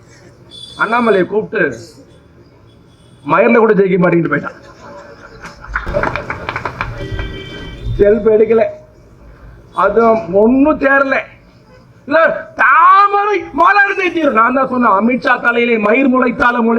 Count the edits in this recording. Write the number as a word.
zero